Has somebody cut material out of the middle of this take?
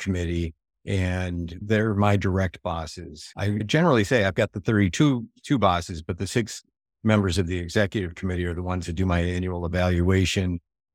yes; 1 cut; at 1.6 s

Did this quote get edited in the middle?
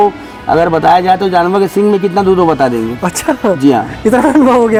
no; 0 cuts

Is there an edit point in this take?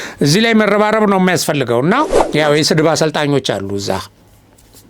yes; 1 cut; at 2.2 s

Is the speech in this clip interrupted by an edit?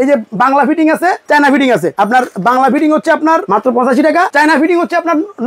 yes; 4 cuts; at 1.2 s, 1.9 s, 3.5 s, 4.3 s

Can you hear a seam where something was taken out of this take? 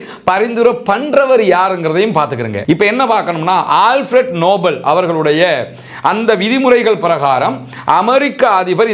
yes; 1 cut; at 2.5 s

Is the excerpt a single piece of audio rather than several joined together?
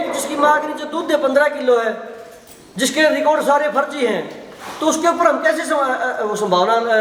yes; 0 cuts

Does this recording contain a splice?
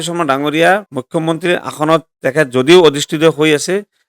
yes; 1 cut; at 0.9 s

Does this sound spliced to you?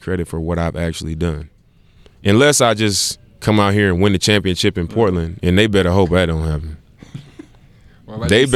no; 0 cuts

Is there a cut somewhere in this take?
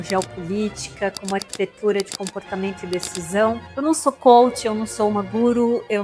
yes; 1 cut; at 3.7 s

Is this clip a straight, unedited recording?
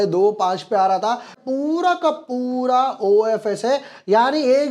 no; 1 cut; at 1.4 s

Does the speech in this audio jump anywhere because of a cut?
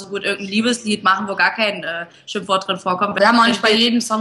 yes; 1 cut; at 3.2 s

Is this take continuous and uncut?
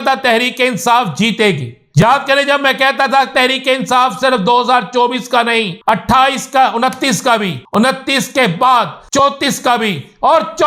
no; 4 cuts; at 2.0 s, 5.8 s, 7.6 s, 9.2 s

